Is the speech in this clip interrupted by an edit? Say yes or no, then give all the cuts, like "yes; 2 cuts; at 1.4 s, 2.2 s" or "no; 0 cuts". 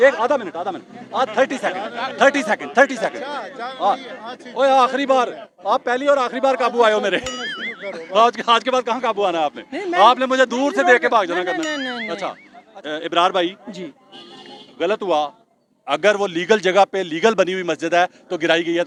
no; 0 cuts